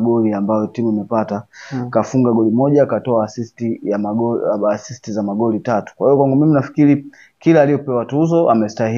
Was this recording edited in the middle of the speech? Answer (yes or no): no